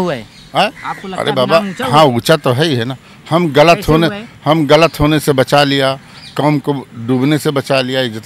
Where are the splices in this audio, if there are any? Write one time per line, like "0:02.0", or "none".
none